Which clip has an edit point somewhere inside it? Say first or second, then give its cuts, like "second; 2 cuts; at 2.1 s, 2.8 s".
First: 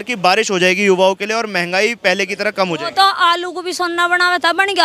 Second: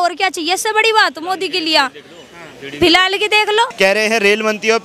second; 1 cut; at 3.7 s